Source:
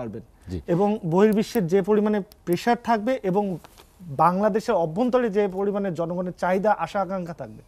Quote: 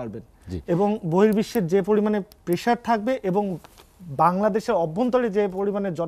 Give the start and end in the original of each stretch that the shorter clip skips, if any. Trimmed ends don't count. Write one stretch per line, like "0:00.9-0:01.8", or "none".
none